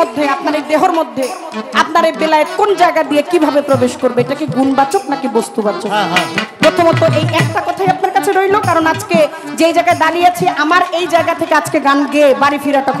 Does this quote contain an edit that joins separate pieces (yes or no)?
no